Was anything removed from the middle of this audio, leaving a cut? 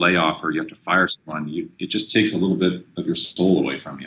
no; 0 cuts

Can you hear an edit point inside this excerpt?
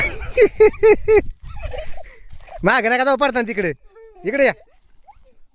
no; 0 cuts

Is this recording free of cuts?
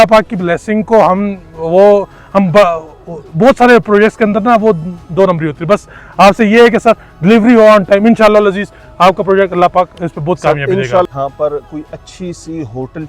no; 1 cut; at 11.1 s

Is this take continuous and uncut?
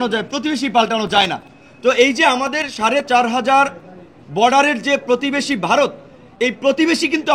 yes; 0 cuts

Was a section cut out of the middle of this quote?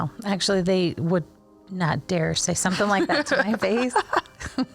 no; 0 cuts

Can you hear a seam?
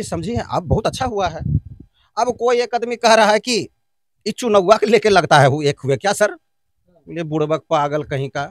no; 0 cuts

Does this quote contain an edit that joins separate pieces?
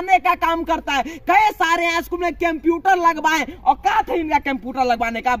no; 0 cuts

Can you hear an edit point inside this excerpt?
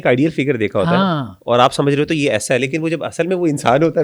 no; 0 cuts

